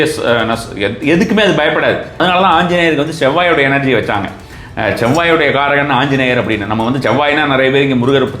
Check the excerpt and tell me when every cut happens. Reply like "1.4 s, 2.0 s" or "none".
2.2 s